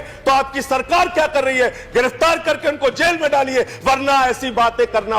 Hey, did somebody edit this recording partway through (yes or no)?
no